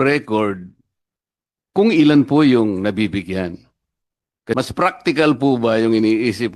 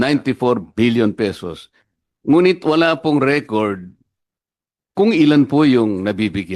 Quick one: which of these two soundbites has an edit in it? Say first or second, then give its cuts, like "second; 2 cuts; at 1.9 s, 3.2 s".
first; 1 cut; at 4.5 s